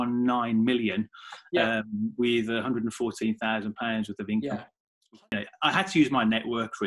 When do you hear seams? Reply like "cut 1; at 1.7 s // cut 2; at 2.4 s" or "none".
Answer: cut 1; at 5.1 s